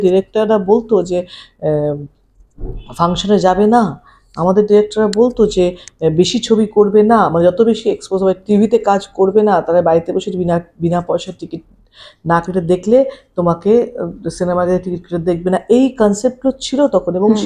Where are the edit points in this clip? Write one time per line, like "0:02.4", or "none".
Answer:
none